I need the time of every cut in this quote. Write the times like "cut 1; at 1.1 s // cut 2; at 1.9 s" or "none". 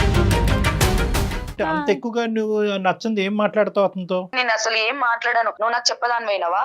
cut 1; at 1.5 s // cut 2; at 4.3 s // cut 3; at 5.5 s